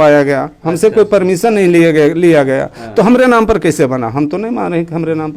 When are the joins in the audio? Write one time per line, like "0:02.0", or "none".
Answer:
none

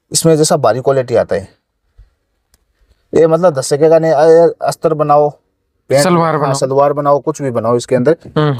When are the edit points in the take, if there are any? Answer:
none

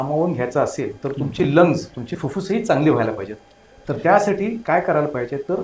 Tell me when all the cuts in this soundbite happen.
none

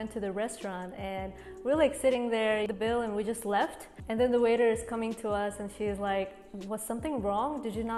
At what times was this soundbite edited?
0:02.7

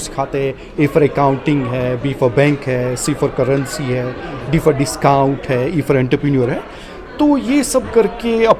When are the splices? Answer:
none

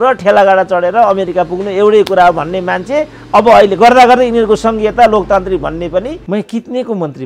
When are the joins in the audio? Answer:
0:06.2

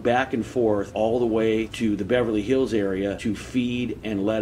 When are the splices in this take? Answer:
0:00.9
0:01.7
0:03.2

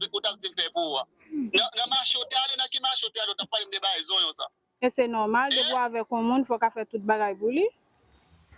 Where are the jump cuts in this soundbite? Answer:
none

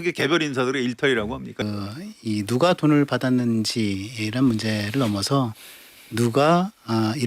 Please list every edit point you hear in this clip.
0:01.6

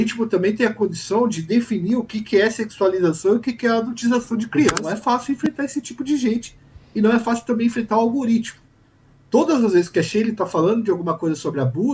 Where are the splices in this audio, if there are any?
0:04.8

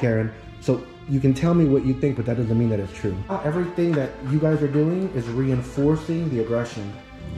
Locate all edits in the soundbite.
0:03.3

